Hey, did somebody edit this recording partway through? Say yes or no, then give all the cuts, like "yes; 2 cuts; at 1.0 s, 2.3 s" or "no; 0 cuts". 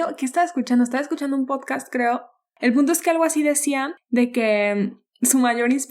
yes; 1 cut; at 2.5 s